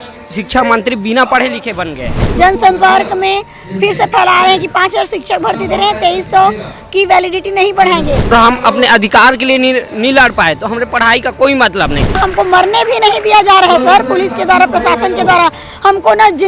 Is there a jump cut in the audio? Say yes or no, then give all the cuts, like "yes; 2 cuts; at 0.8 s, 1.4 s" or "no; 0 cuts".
yes; 3 cuts; at 2.2 s, 8.3 s, 12.2 s